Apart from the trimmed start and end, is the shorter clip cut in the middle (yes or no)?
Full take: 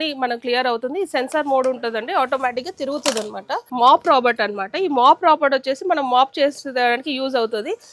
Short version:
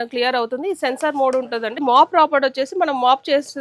yes